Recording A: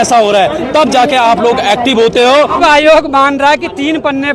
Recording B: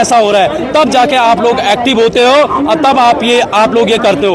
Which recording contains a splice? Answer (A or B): A